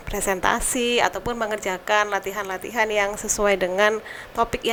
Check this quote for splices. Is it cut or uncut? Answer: uncut